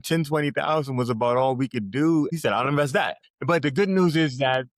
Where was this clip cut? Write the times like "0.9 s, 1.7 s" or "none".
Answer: 2.3 s, 3.3 s